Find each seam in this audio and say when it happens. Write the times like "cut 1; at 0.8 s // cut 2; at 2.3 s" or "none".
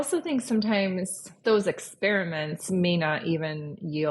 cut 1; at 1.4 s